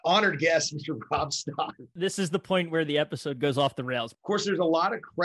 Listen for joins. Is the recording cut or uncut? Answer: cut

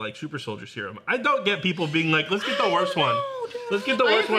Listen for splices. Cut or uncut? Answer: uncut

